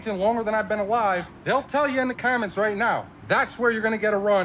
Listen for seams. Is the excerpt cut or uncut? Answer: cut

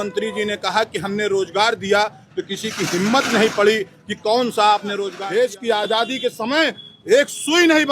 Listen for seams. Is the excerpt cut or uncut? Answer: cut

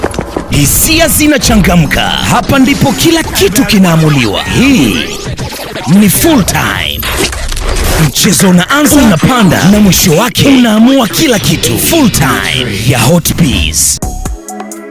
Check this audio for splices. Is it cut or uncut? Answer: cut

